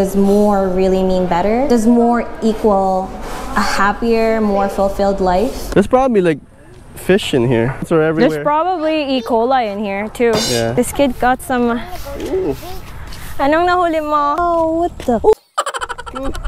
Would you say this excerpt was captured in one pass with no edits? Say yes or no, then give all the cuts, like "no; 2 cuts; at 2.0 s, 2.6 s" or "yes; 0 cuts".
no; 4 cuts; at 5.6 s, 7.9 s, 10.7 s, 14.4 s